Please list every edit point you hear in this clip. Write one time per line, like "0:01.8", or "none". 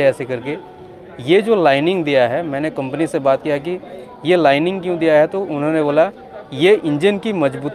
none